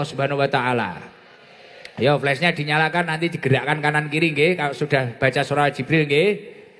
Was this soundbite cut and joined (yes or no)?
no